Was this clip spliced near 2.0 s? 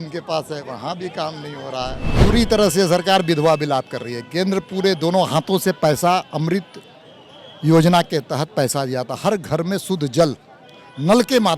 yes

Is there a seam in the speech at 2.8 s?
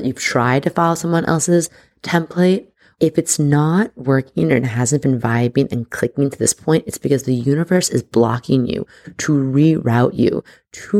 yes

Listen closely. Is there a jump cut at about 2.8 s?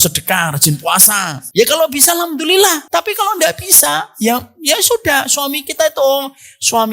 yes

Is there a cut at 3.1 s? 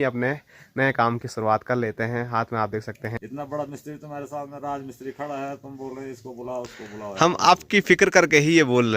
yes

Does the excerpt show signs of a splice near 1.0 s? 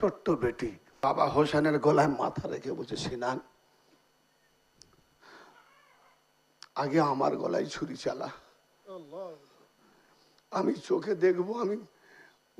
yes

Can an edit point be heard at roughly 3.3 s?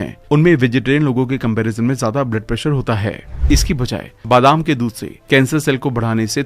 yes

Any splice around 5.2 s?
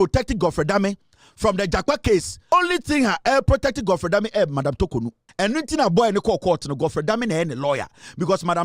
yes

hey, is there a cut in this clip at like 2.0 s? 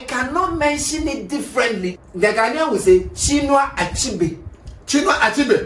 yes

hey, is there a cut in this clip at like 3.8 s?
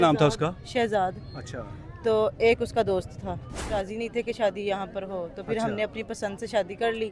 yes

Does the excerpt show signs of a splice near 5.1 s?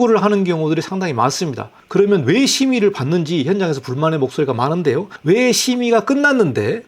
yes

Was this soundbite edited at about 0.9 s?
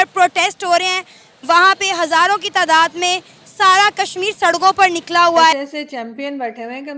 no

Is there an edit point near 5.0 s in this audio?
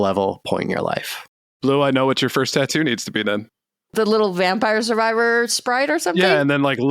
no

